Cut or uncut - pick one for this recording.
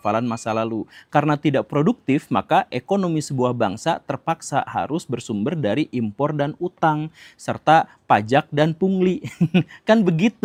uncut